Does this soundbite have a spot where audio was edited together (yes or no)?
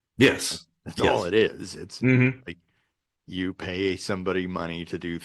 no